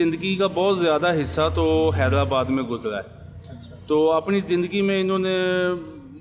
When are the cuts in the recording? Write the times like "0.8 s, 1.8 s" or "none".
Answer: none